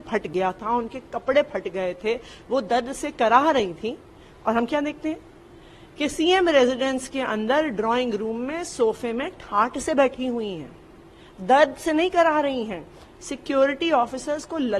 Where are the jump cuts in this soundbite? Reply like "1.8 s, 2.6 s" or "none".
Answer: none